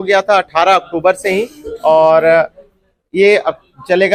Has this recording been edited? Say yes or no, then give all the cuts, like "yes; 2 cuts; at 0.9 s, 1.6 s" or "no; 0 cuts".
no; 0 cuts